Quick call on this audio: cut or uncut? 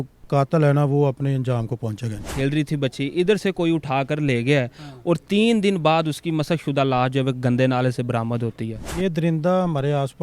cut